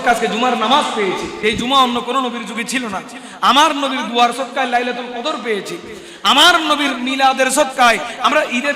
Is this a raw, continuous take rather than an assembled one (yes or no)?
no